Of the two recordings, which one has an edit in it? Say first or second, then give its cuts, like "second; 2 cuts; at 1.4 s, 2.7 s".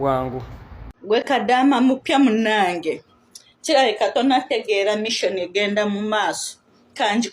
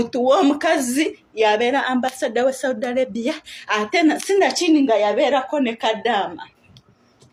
first; 1 cut; at 1.0 s